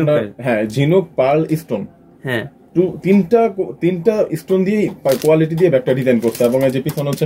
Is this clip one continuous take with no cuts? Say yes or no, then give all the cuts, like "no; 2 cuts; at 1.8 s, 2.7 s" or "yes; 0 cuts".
yes; 0 cuts